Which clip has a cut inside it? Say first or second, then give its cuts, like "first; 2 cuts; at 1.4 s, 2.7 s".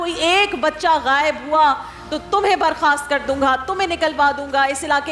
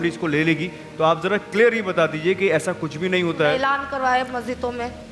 second; 1 cut; at 3.6 s